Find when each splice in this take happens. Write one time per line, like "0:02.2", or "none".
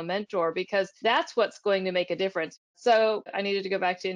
0:00.9
0:02.5
0:03.3